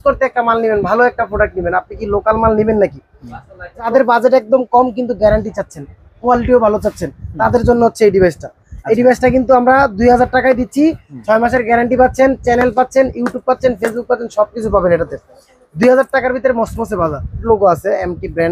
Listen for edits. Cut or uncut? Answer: cut